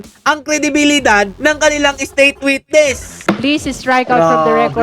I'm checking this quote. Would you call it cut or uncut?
cut